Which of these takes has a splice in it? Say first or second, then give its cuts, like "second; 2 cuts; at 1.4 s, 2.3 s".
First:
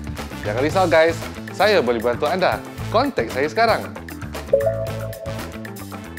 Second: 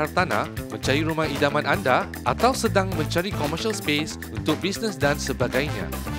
first; 1 cut; at 5.3 s